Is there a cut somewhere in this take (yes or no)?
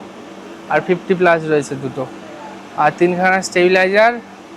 no